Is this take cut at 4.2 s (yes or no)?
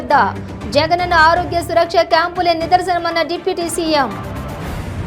yes